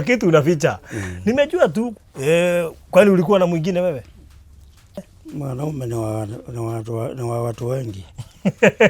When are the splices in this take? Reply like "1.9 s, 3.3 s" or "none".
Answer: 2.0 s, 5.1 s